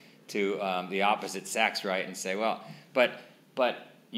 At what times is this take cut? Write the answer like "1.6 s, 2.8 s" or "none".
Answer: none